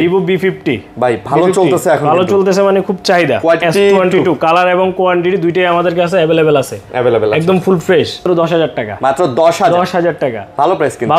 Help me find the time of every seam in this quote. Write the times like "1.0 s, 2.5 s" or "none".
3.6 s, 8.2 s